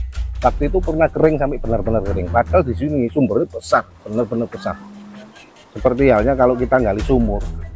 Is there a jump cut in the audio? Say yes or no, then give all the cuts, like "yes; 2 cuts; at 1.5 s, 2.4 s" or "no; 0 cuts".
no; 0 cuts